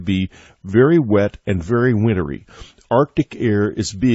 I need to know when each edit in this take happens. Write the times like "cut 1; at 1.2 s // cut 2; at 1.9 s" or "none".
none